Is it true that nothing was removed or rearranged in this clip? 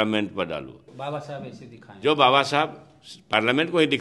no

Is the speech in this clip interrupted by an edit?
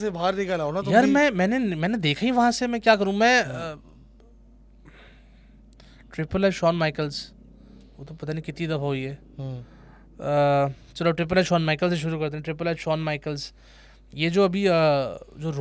no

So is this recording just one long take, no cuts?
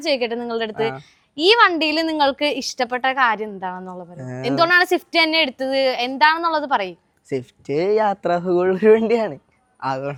yes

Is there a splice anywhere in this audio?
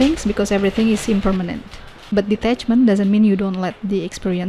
yes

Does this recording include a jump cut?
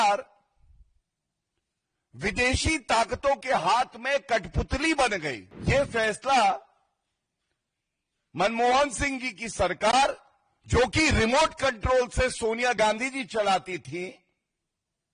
yes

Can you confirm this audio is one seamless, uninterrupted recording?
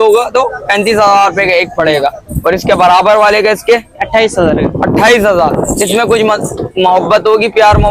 yes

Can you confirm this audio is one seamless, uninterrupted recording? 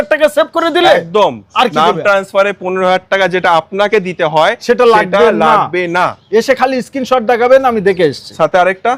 yes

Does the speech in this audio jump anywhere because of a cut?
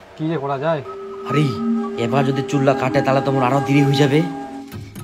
yes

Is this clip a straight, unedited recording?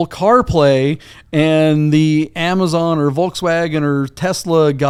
yes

